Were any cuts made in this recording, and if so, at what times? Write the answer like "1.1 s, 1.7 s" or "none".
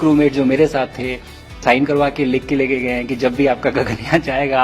1.6 s